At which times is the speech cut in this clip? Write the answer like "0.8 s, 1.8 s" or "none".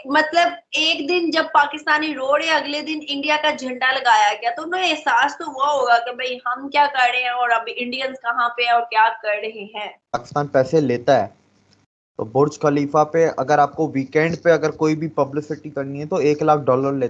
10.2 s